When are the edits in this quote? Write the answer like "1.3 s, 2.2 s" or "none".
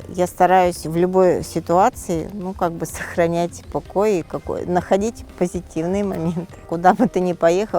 6.6 s